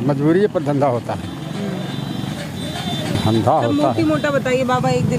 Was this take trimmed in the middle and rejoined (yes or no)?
no